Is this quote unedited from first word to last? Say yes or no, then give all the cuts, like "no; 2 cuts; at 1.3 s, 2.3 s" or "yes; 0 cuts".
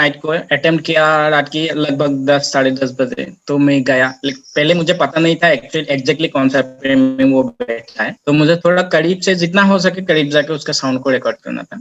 yes; 0 cuts